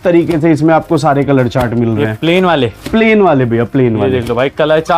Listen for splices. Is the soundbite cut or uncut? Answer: uncut